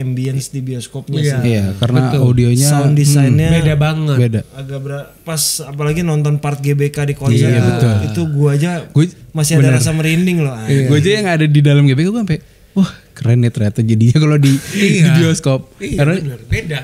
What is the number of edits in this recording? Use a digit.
0